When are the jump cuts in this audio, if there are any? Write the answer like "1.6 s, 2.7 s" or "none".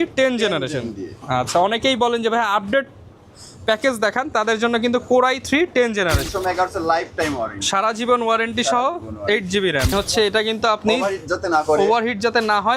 6.3 s, 9.9 s